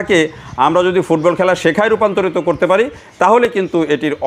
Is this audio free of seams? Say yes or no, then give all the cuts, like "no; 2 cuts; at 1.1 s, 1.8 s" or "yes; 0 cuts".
yes; 0 cuts